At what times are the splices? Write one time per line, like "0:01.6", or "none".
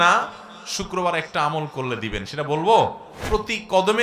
0:03.1